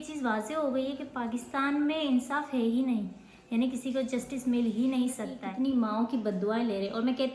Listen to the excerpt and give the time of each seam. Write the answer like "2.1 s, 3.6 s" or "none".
5.4 s